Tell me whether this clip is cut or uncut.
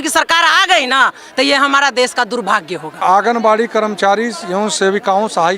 cut